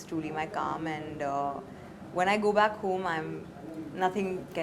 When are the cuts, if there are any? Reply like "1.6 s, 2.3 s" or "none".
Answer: none